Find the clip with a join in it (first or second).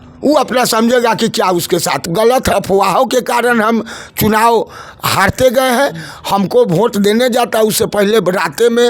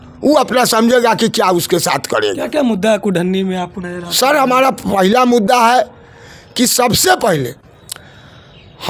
first